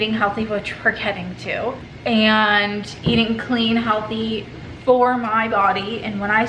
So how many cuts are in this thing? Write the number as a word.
zero